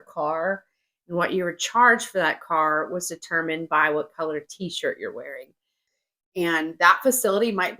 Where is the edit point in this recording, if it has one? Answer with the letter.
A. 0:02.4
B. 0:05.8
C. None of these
B